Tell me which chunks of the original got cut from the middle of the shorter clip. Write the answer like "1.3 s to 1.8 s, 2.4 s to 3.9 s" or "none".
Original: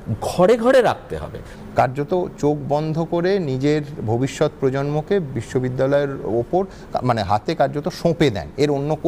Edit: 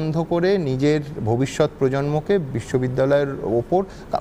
none